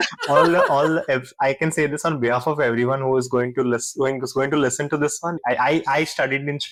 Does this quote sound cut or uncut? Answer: uncut